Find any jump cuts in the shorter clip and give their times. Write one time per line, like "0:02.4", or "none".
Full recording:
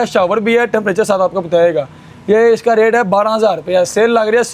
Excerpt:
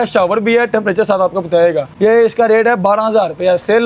0:01.9